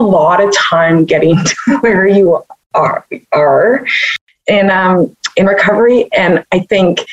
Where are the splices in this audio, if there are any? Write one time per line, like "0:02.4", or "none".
none